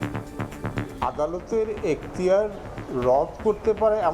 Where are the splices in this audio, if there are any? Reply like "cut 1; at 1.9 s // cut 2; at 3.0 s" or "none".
cut 1; at 1.0 s